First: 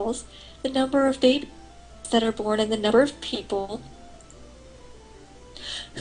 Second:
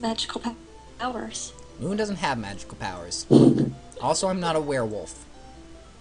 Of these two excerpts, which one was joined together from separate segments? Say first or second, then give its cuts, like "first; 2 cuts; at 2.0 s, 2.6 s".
second; 1 cut; at 3.4 s